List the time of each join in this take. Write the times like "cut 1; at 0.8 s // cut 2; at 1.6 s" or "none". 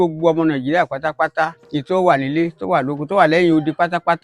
cut 1; at 1.6 s